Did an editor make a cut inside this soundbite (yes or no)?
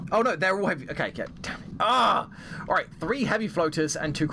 no